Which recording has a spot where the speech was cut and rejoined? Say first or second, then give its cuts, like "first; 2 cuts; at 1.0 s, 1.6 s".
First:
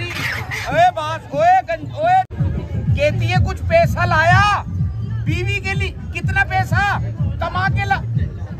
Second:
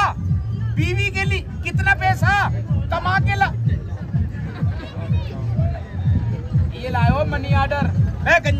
first; 1 cut; at 2.3 s